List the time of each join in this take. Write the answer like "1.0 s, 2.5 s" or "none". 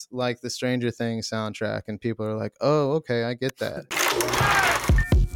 3.9 s